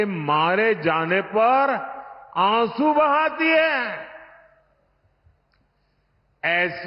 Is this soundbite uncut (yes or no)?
yes